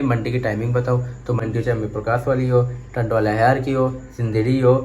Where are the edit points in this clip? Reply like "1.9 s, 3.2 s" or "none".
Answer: 1.4 s